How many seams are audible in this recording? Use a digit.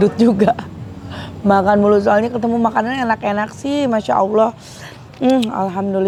0